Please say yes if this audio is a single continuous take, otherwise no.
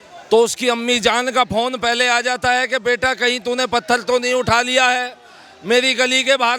yes